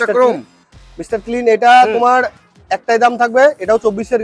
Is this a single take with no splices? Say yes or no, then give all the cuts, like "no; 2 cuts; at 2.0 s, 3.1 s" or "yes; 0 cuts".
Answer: yes; 0 cuts